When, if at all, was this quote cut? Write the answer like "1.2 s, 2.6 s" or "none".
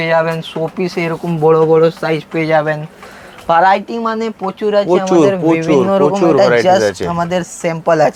none